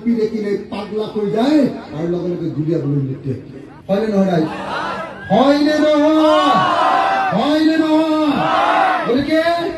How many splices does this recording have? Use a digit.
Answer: 0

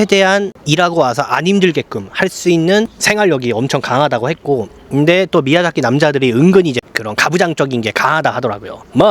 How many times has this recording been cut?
2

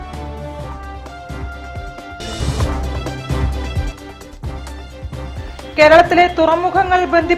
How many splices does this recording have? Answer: 1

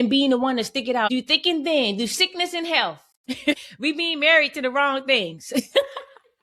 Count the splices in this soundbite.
2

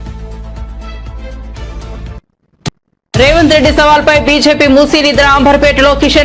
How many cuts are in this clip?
1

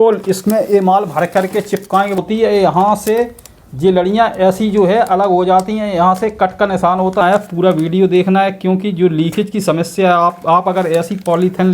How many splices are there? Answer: 2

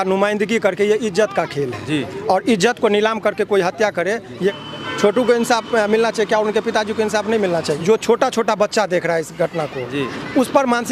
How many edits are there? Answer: 2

